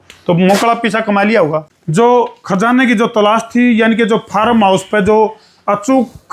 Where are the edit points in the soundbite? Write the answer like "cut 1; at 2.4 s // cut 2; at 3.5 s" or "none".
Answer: cut 1; at 1.7 s